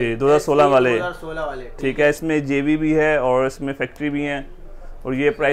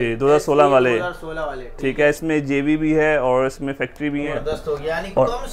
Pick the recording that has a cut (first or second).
second